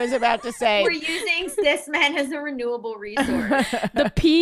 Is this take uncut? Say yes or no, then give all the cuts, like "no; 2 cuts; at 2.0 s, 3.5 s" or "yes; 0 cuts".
no; 1 cut; at 1.0 s